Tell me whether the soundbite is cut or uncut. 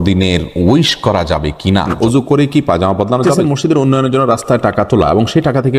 cut